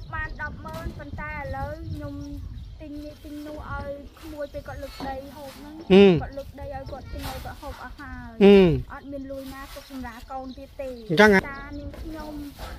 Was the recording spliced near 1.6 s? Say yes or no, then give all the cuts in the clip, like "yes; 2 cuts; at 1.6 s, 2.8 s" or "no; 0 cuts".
no; 1 cut; at 11.4 s